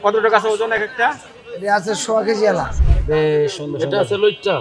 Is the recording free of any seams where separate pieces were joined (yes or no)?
no